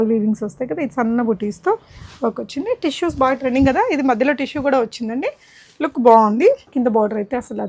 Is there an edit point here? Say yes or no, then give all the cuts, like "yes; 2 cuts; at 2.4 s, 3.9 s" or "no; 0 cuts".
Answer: yes; 1 cut; at 6.7 s